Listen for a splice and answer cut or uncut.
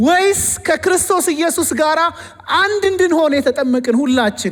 uncut